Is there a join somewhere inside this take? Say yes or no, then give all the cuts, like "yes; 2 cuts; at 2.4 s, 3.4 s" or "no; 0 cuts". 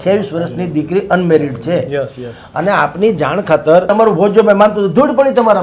yes; 1 cut; at 3.9 s